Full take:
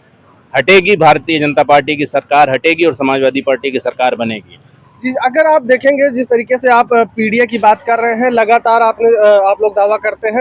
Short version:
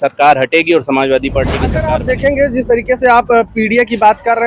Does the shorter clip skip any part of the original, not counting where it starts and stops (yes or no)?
yes